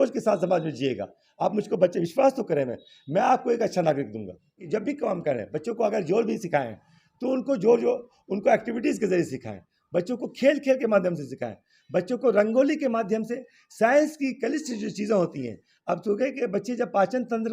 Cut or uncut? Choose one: cut